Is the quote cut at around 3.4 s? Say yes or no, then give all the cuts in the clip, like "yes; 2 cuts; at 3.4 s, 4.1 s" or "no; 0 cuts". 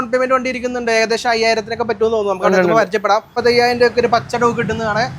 yes; 1 cut; at 3.4 s